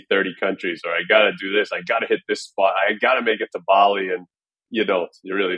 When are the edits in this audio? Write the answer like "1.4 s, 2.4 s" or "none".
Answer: 4.6 s